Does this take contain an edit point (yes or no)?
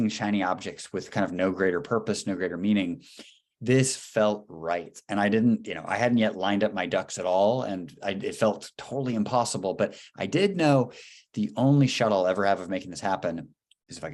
no